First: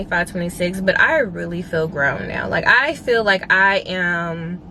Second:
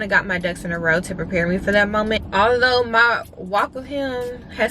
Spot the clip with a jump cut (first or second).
second